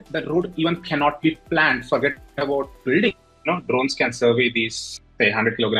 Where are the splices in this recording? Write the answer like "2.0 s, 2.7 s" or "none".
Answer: 2.7 s, 3.3 s